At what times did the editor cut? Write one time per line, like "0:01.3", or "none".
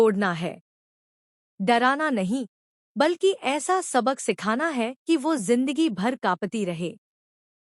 0:04.4